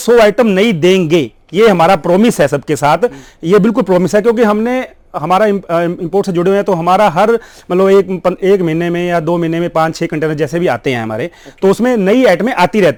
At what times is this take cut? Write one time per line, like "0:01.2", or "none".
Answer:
none